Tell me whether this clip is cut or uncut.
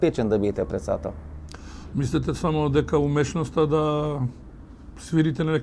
uncut